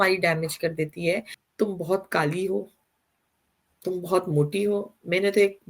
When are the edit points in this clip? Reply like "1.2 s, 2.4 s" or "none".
1.4 s